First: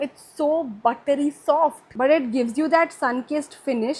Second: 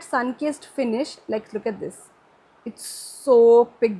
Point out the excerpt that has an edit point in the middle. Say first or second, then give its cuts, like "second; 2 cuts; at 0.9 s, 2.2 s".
first; 1 cut; at 1.8 s